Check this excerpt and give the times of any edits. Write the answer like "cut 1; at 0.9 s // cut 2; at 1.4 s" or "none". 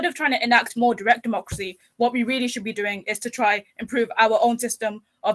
none